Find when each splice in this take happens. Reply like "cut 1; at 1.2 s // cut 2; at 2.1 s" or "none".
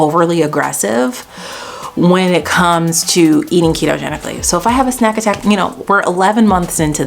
none